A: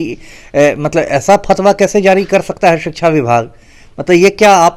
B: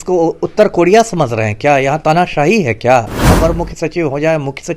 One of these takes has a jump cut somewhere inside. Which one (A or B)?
B